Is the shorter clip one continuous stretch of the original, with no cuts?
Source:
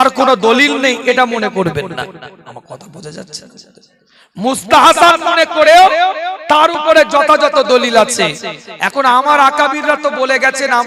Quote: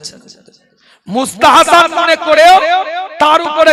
yes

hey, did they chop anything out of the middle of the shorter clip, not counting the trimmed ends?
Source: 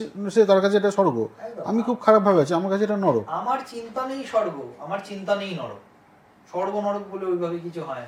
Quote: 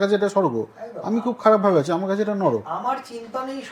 no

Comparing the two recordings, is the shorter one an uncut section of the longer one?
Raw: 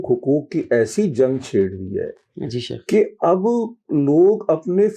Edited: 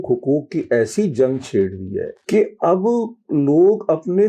no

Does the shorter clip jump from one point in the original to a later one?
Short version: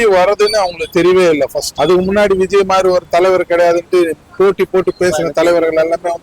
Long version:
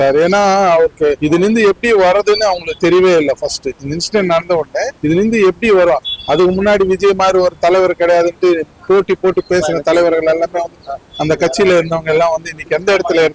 yes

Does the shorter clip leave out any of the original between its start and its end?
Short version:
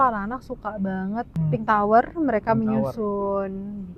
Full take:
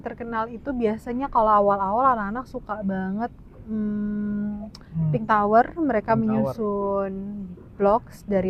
yes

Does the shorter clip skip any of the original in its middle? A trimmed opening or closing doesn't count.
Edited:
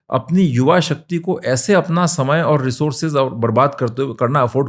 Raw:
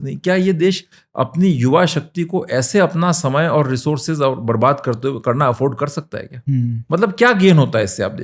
no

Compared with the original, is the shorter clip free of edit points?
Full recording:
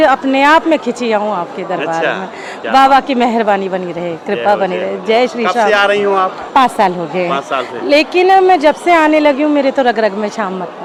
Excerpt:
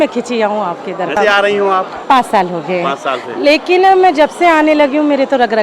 no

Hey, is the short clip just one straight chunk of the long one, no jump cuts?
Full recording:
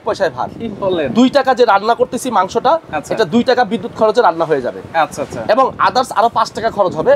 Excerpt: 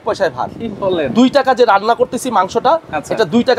yes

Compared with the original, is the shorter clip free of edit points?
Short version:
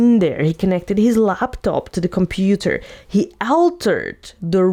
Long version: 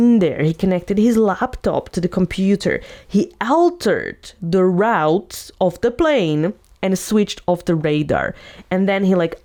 yes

